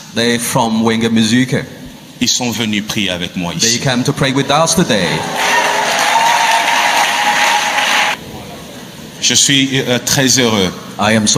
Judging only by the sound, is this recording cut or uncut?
cut